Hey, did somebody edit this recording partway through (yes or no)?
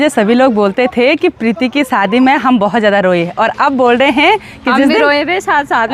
no